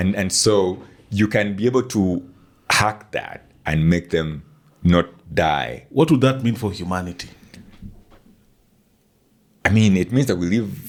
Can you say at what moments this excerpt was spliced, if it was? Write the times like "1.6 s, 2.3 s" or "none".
none

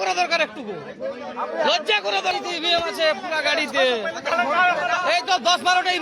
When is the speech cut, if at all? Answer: 2.3 s

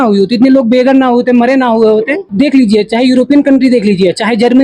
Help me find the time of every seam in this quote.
2.2 s

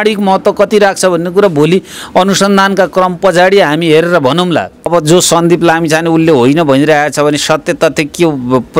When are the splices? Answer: 4.9 s

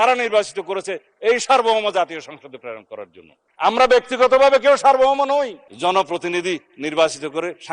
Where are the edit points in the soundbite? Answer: 5.7 s

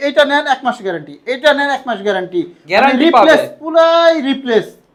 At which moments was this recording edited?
none

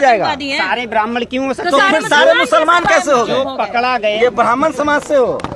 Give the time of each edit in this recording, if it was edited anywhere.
4.1 s

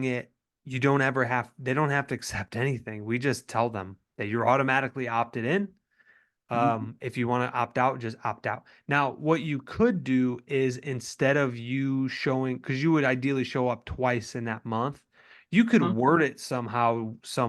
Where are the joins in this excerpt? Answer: none

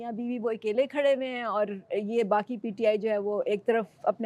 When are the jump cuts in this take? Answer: none

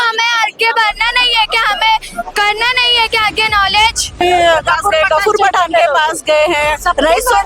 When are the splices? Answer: 4.2 s

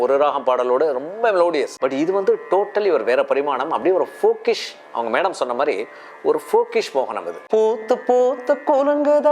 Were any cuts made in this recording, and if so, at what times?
1.7 s, 7.3 s

